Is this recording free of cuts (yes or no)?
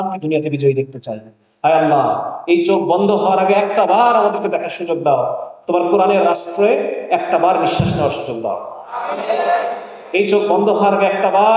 yes